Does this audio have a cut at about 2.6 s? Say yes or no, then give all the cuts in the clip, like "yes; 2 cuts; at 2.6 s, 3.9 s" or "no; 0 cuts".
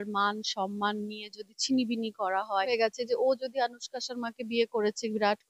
yes; 1 cut; at 2.6 s